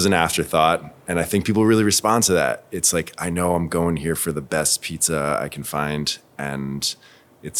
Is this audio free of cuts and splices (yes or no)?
yes